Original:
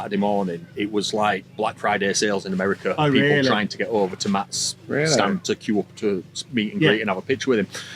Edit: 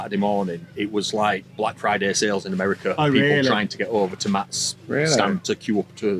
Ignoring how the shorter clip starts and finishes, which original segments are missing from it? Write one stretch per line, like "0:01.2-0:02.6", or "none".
none

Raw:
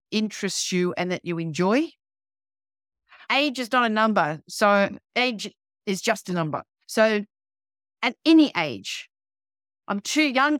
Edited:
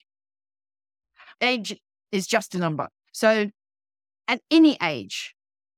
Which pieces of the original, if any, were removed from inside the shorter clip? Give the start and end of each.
0:03.2-0:05.0

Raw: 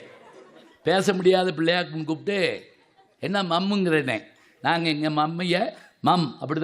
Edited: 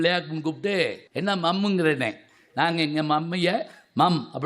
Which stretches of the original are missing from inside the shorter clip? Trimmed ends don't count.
0:02.7-0:03.1

